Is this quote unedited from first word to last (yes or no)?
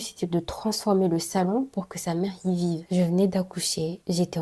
no